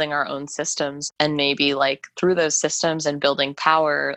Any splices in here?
no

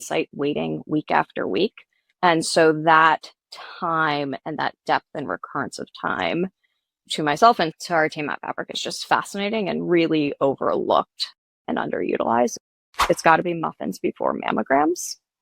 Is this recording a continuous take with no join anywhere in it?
no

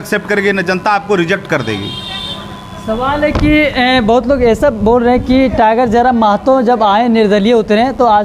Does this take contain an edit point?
no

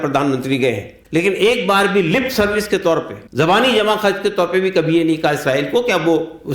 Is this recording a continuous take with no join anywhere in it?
no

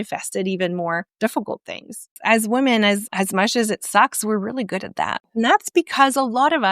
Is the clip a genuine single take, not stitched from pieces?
no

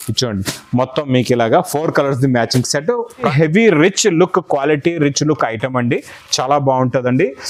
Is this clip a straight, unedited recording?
no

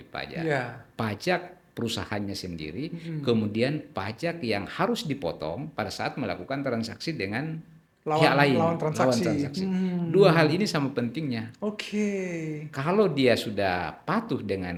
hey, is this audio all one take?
yes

